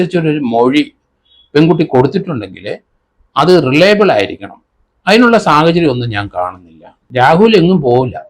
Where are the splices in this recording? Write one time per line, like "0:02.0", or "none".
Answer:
0:07.0